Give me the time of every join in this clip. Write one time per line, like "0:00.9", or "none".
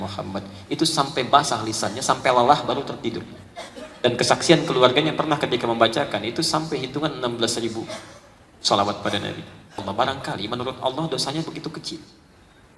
0:09.8